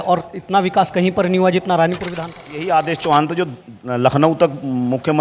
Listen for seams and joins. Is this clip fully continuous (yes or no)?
no